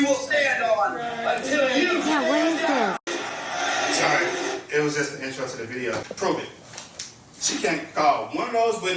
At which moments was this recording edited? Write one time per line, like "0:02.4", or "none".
0:03.0
0:06.0